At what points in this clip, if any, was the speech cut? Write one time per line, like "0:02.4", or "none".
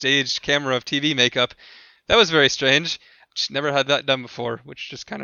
0:03.2

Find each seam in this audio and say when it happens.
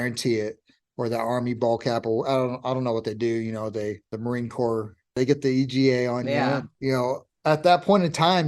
0:04.1
0:05.2
0:07.2

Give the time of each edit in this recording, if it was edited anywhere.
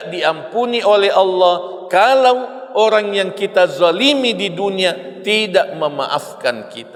none

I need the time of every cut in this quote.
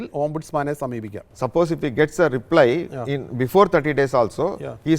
0:01.3

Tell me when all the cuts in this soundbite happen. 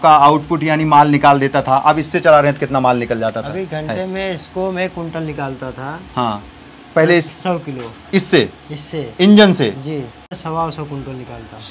0:10.2

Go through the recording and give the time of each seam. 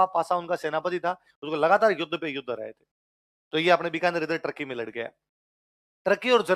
none

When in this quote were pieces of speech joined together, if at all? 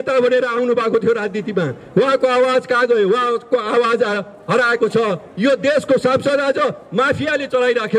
none

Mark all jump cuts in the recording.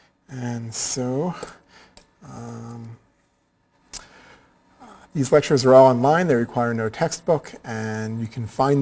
0:05.1

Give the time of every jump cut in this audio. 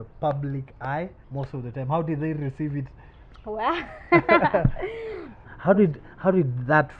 0:01.2
0:05.3

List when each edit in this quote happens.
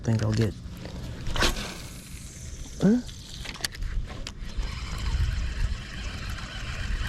none

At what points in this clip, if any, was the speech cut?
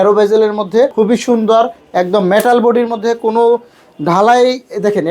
0:00.9

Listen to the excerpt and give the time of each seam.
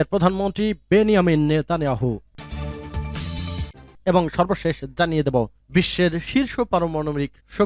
0:02.3
0:03.9

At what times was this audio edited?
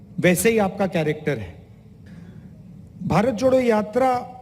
0:02.1

